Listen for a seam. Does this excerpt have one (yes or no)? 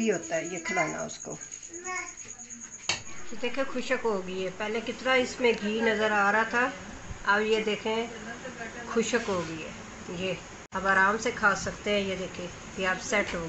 yes